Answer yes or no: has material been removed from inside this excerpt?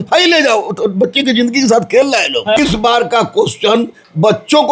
yes